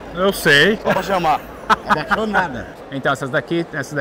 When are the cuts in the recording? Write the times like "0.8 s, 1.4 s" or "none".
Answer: 2.7 s